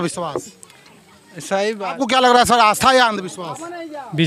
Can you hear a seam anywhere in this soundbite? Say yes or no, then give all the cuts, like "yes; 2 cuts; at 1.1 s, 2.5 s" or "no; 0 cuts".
yes; 1 cut; at 2.0 s